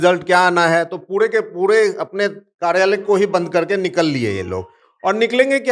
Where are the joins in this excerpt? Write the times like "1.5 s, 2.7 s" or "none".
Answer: none

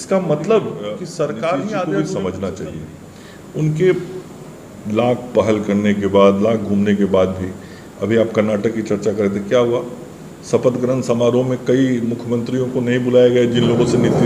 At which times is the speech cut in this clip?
1.9 s

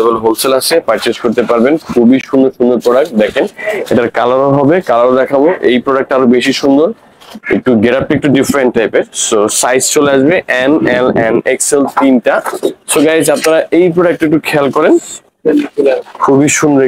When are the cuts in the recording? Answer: none

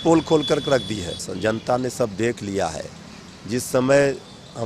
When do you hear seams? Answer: 1.2 s

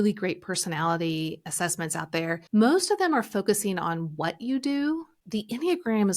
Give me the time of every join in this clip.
2.4 s, 5.2 s

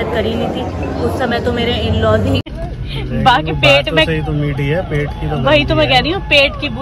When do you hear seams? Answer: 2.5 s

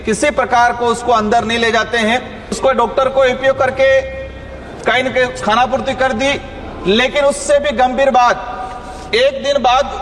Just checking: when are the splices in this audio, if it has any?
2.6 s

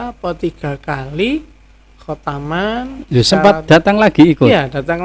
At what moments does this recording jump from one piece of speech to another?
none

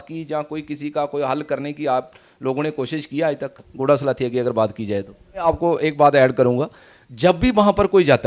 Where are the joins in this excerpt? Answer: 5.4 s

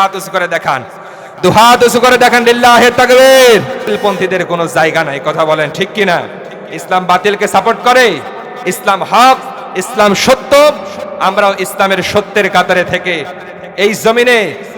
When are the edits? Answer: 4.0 s

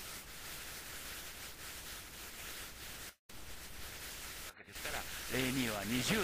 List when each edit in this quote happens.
4.5 s

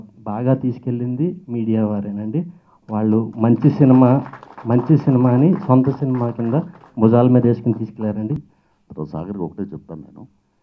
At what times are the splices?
8.4 s

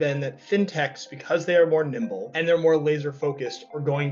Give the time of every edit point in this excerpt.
2.3 s

